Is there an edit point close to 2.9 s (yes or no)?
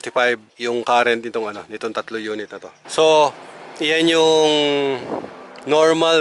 yes